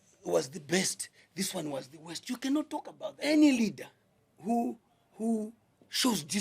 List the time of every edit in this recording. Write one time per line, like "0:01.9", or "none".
0:03.1